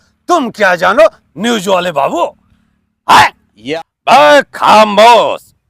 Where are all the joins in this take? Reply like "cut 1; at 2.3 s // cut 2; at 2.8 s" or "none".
cut 1; at 3.5 s